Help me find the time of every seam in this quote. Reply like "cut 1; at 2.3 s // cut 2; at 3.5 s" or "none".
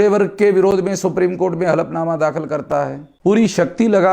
cut 1; at 3.0 s